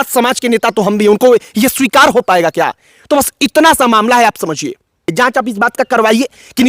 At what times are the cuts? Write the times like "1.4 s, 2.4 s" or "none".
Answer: 5.1 s